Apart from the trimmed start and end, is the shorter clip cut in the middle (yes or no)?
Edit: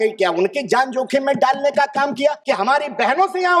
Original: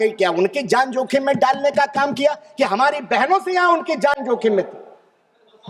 yes